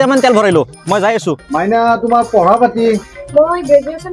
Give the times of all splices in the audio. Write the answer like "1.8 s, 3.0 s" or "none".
1.4 s